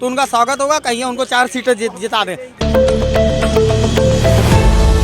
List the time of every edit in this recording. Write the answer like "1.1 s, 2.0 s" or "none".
2.6 s